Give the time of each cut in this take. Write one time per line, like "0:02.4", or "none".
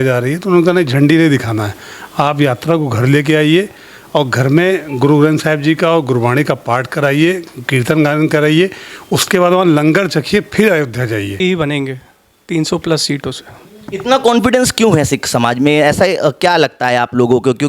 0:11.3